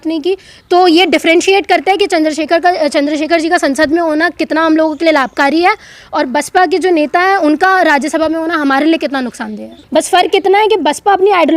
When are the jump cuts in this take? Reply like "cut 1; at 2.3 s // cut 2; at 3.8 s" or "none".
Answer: cut 1; at 9.8 s